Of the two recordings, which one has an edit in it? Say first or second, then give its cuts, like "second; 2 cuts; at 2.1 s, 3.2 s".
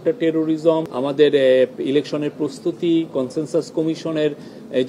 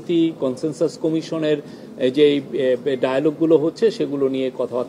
first; 1 cut; at 0.9 s